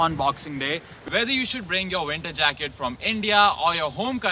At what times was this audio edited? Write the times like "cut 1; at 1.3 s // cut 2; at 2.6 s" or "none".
cut 1; at 0.9 s